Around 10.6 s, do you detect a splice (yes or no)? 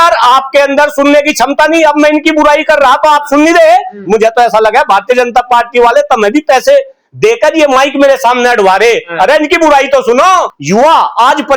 yes